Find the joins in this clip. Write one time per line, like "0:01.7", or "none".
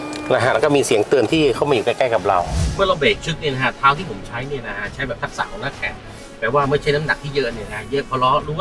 0:02.6